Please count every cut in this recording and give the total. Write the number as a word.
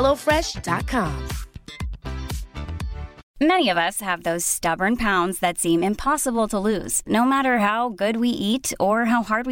one